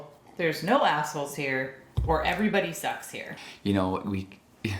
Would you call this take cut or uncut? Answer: cut